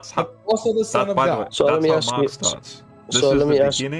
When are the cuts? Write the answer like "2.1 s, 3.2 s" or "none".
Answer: 1.5 s